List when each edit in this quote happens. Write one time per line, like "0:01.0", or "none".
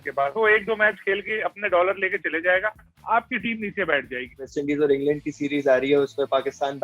0:04.5